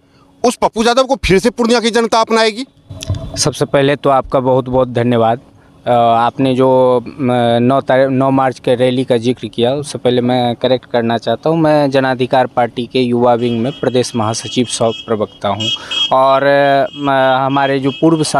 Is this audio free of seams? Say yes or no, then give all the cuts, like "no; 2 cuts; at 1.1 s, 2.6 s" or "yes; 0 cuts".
yes; 0 cuts